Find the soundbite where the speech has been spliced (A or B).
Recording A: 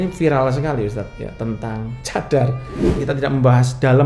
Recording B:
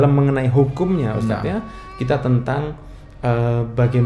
A